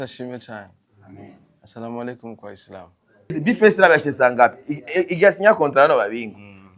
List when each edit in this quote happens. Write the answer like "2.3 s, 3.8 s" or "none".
3.4 s